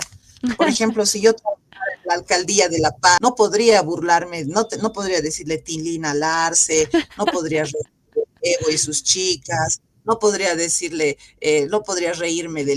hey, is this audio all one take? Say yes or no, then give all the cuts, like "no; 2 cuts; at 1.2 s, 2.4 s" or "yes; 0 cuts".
no; 1 cut; at 3.2 s